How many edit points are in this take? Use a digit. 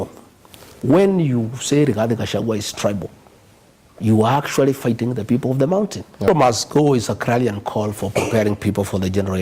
1